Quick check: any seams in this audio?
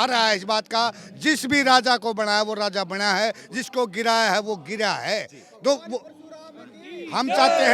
no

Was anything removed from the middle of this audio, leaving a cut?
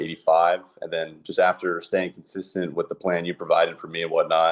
no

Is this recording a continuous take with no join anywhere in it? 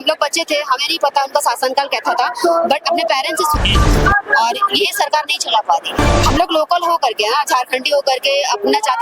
no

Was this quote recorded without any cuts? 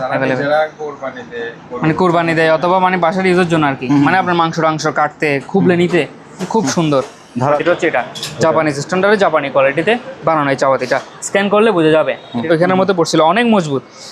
no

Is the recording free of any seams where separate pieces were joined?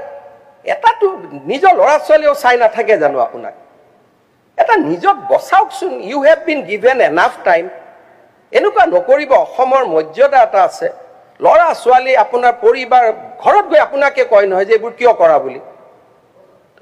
yes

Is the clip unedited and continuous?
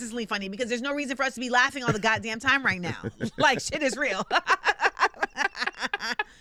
yes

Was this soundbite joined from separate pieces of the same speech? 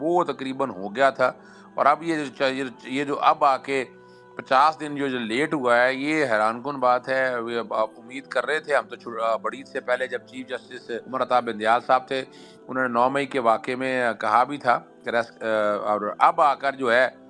yes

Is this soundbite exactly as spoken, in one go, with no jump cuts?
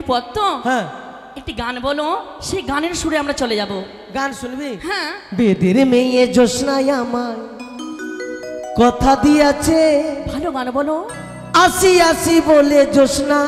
yes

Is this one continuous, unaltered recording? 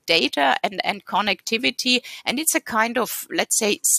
yes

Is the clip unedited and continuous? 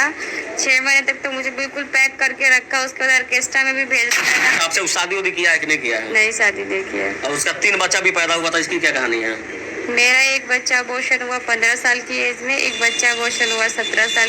no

